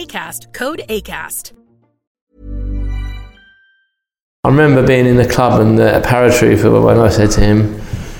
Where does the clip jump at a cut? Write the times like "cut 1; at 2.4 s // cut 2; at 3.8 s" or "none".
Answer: cut 1; at 4.2 s